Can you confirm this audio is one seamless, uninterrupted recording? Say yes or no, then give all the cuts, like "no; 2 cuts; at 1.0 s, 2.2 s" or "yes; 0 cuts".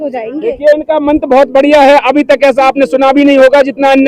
yes; 0 cuts